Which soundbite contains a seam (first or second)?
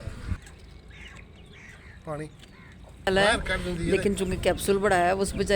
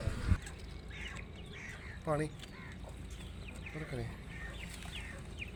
first